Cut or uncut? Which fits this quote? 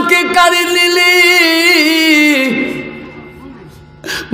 uncut